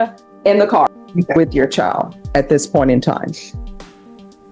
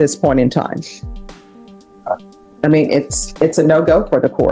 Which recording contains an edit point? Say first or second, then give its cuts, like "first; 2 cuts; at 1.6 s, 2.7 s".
first; 1 cut; at 1.0 s